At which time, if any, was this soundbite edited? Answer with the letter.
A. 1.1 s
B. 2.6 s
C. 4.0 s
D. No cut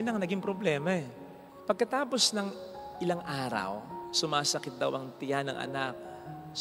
C